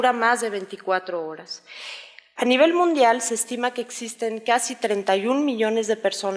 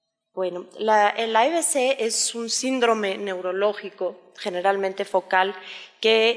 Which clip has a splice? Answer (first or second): second